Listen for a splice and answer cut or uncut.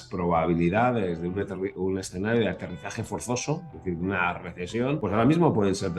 cut